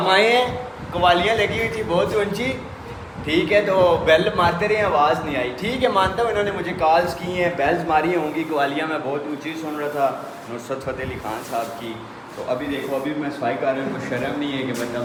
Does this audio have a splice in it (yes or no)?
no